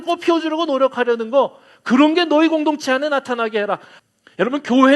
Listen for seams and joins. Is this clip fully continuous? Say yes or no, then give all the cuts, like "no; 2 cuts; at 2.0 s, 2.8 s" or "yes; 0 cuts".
no; 1 cut; at 3.9 s